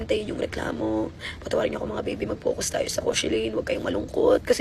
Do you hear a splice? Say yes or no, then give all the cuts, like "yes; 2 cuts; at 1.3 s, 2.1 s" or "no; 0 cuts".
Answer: no; 0 cuts